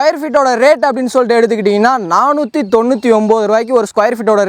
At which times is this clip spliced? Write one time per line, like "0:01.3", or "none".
none